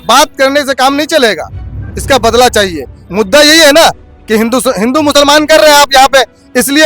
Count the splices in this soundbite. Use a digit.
1